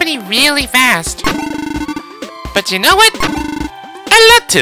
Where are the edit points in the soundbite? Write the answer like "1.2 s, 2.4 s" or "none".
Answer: none